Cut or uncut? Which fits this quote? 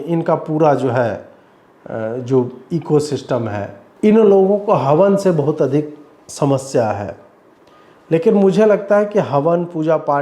cut